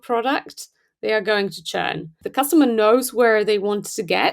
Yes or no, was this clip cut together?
yes